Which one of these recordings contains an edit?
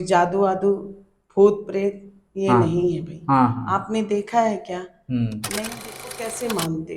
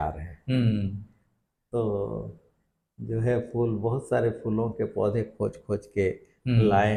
first; 1 cut; at 5.7 s

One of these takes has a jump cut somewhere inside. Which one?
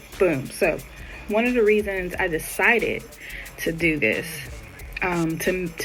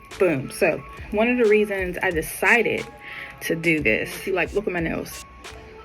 second; 2 cuts; at 0.9 s, 4.2 s

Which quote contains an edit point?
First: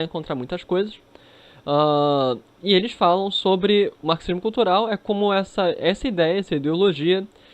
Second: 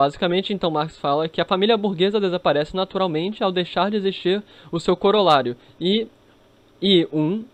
first; 1 cut; at 2.1 s

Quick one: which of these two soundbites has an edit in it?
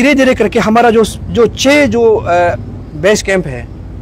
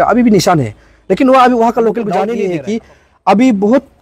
second; 1 cut; at 2.3 s

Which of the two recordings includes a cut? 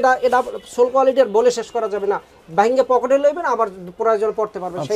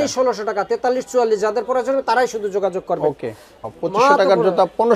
second; 1 cut; at 3.7 s

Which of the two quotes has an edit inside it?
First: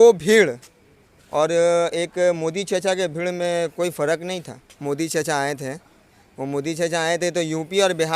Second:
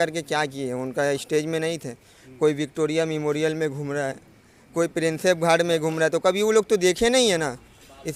first; 1 cut; at 4.7 s

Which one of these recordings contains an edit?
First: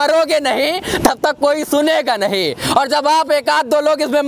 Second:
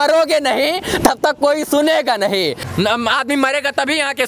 second; 1 cut; at 2.6 s

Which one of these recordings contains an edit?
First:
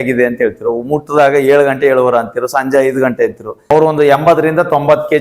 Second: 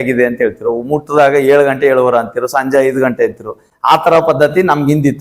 first; 1 cut; at 3.7 s

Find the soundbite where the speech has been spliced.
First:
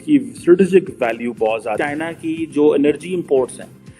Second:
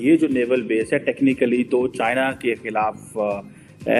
first; 1 cut; at 1.8 s

